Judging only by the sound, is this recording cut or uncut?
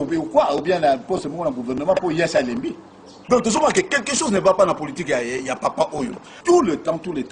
cut